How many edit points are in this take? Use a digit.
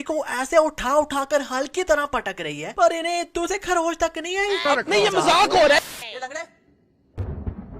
2